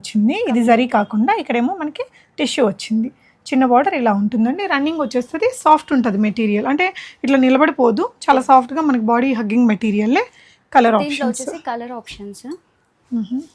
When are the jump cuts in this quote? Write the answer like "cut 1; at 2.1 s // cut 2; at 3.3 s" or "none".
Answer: none